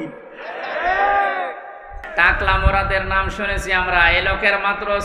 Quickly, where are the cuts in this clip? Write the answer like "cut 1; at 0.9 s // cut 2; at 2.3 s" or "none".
cut 1; at 2.0 s